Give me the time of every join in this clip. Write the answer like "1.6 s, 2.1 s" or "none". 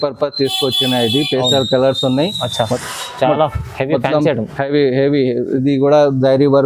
2.4 s